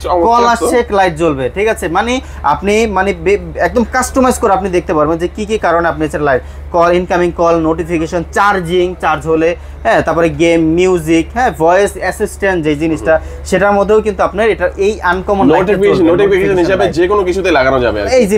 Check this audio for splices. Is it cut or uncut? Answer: uncut